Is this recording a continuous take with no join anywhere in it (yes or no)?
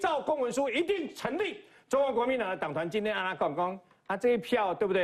yes